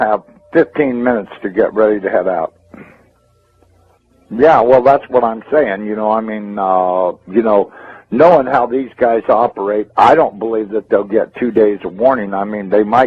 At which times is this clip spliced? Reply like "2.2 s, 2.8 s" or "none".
2.9 s